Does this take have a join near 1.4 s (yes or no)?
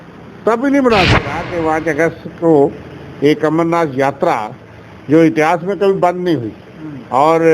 yes